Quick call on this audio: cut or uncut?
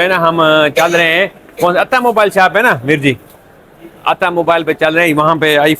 uncut